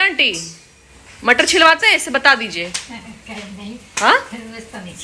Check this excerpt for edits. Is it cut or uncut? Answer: uncut